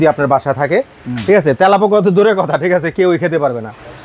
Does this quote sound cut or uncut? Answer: uncut